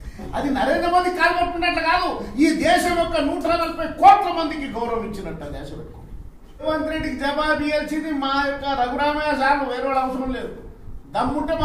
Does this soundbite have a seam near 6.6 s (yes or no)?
yes